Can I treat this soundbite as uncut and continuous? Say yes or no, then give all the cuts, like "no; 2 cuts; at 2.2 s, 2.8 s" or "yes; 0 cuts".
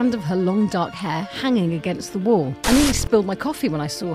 no; 1 cut; at 2.6 s